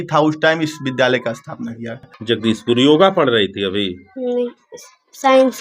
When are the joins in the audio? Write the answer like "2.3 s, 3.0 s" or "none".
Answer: 2.1 s